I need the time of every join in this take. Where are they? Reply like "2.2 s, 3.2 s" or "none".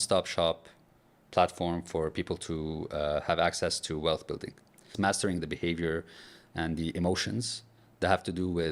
4.9 s